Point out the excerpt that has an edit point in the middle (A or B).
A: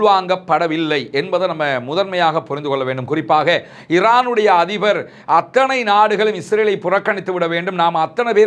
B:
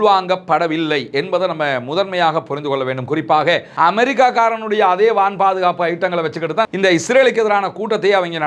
B